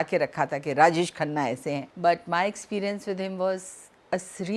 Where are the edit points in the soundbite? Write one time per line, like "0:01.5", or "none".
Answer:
0:01.9